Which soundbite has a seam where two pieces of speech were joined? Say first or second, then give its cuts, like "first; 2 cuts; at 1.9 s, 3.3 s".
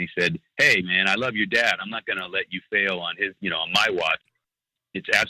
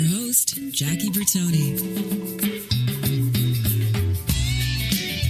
first; 1 cut; at 4.2 s